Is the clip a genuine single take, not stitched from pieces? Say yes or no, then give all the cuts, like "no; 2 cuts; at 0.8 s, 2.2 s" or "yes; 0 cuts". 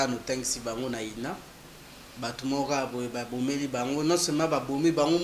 yes; 0 cuts